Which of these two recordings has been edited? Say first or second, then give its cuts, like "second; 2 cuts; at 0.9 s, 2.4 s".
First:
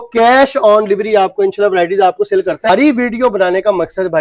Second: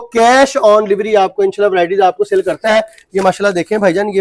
first; 1 cut; at 2.7 s